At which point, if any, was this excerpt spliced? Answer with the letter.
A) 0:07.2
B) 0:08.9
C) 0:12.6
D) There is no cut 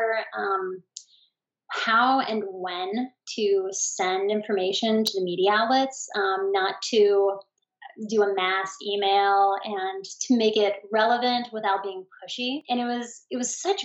C